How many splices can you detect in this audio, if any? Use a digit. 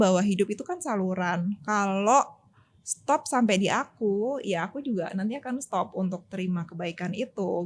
0